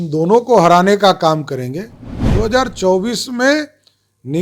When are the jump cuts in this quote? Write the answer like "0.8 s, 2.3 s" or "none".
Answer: none